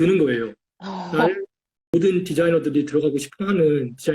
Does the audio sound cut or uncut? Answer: cut